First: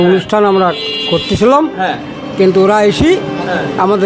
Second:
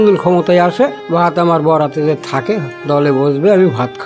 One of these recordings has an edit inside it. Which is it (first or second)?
second